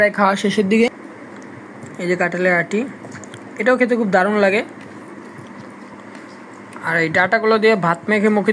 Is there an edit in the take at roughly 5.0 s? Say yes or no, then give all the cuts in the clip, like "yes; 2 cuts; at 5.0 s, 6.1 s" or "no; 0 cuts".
yes; 2 cuts; at 0.9 s, 5.0 s